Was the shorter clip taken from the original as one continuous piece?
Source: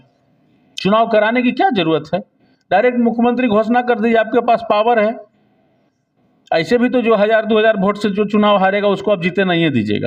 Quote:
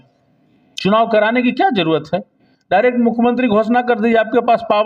yes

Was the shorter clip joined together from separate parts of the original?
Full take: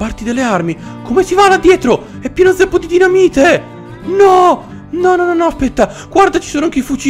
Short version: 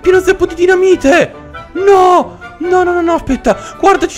no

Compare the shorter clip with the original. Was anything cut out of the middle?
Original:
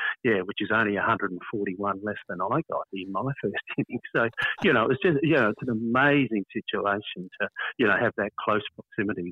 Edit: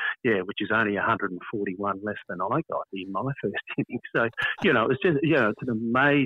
no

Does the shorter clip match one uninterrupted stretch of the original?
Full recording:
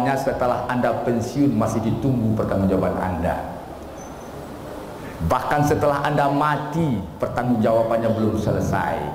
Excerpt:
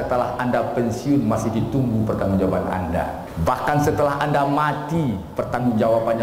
no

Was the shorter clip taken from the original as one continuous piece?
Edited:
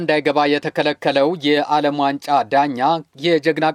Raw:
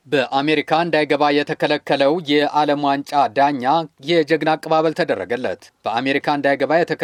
yes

